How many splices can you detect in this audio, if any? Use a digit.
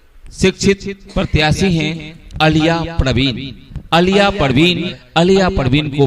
1